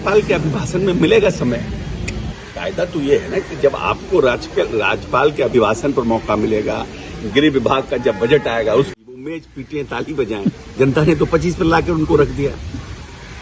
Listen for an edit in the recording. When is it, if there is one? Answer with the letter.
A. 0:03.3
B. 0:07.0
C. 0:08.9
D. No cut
C